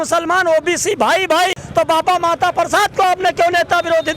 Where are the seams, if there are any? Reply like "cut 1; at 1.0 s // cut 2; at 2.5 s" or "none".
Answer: cut 1; at 1.6 s